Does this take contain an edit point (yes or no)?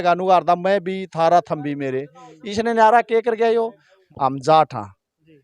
yes